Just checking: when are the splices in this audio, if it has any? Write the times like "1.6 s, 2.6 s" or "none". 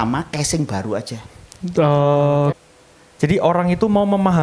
2.5 s